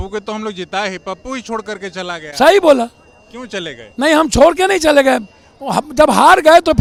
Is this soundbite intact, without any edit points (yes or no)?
yes